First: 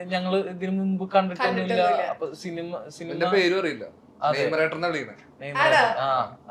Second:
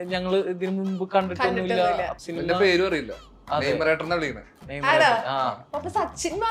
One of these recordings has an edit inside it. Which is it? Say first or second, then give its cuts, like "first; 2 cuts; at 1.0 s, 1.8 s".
second; 2 cuts; at 2.2 s, 5.6 s